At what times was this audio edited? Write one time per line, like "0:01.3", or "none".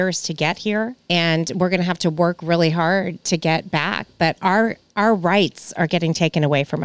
0:01.0
0:03.2